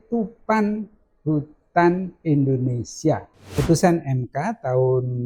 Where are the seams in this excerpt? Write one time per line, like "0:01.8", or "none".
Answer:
0:03.5